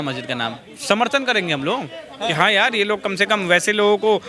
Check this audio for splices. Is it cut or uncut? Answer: uncut